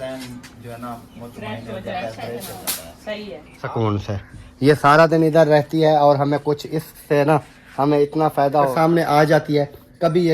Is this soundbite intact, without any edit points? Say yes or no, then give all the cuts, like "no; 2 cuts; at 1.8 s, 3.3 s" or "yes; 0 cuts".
no; 2 cuts; at 3.5 s, 8.7 s